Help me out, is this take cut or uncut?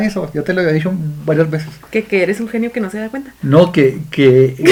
uncut